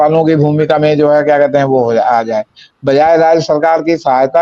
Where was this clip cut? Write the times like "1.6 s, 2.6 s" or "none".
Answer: none